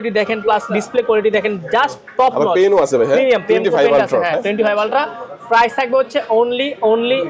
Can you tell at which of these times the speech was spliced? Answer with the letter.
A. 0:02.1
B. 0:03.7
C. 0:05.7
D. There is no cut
D